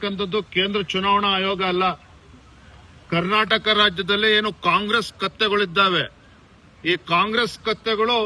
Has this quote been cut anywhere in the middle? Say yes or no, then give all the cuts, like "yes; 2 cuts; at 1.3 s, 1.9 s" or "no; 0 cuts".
no; 0 cuts